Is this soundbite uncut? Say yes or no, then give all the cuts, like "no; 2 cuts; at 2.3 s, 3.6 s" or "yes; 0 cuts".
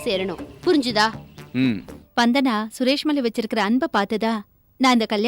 no; 1 cut; at 1.9 s